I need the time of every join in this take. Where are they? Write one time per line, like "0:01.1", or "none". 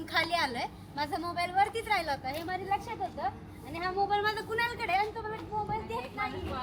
none